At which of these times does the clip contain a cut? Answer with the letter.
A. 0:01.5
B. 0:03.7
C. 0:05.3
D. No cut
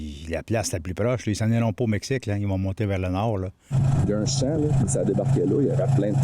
B